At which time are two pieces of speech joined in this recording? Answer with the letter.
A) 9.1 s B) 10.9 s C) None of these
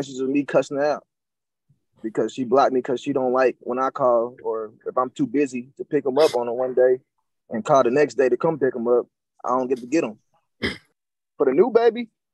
B